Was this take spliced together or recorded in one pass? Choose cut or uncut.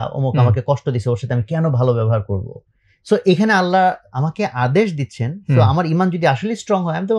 uncut